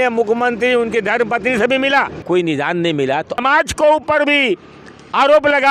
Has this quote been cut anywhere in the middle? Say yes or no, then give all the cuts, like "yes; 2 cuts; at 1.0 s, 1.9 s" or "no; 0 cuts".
yes; 2 cuts; at 2.2 s, 3.3 s